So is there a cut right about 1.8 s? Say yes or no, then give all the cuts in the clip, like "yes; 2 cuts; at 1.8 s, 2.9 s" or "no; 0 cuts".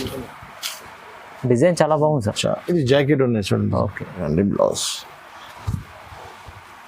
no; 1 cut; at 4.2 s